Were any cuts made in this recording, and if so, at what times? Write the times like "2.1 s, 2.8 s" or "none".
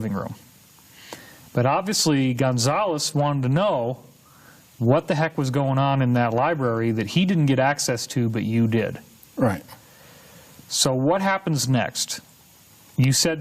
4.0 s

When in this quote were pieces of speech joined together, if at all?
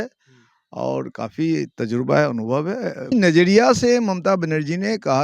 3.1 s

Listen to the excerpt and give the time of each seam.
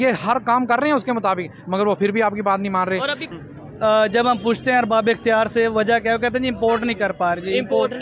3.2 s

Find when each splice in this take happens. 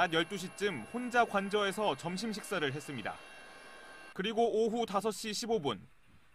4.9 s

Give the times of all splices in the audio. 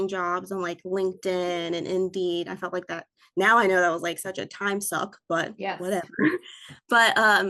none

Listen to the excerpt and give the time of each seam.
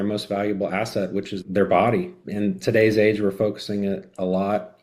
1.3 s, 2.2 s

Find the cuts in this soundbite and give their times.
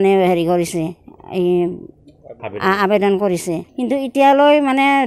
3.7 s

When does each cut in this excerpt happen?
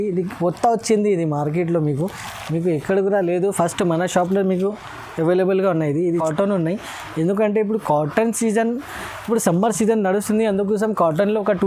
6.1 s

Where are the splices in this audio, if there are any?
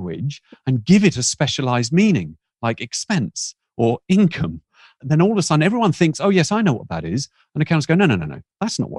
none

